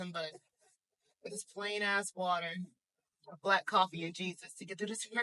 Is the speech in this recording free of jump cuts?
yes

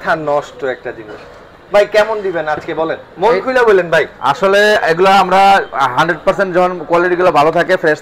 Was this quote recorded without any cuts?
yes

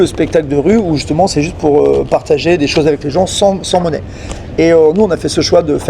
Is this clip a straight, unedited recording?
yes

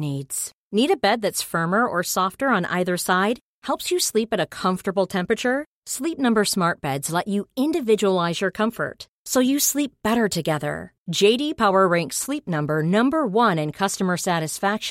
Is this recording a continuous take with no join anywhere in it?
yes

